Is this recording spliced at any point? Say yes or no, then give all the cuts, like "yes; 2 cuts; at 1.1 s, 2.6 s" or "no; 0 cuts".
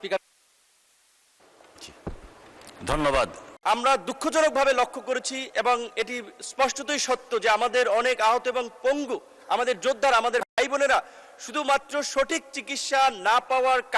yes; 1 cut; at 3.5 s